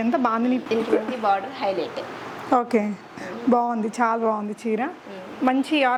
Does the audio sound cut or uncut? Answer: uncut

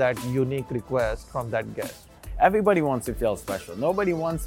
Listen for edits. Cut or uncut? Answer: cut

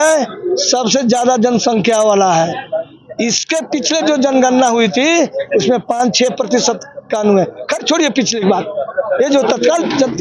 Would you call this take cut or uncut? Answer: uncut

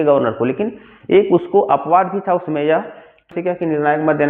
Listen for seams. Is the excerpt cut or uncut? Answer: cut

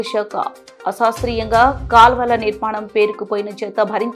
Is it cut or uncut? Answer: uncut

